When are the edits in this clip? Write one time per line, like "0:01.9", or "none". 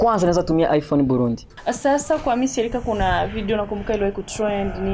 0:01.5